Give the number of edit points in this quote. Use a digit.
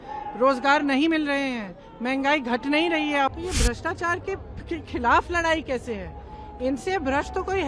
1